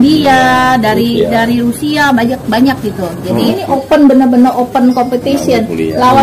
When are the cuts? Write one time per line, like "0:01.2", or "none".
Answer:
0:03.5